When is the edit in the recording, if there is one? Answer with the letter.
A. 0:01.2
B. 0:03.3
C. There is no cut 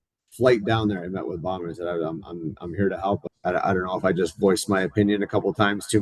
B